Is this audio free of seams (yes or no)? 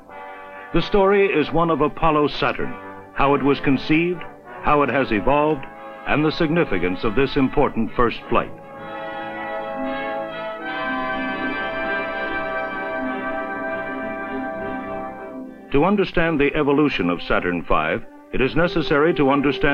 yes